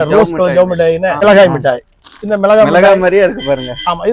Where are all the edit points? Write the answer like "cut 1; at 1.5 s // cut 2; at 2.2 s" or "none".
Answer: cut 1; at 1.2 s